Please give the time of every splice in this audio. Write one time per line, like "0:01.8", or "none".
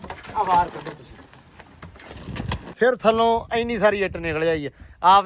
0:02.7